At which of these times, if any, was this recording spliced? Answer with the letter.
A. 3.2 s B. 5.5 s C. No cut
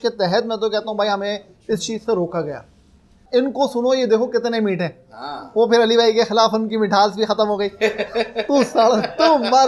A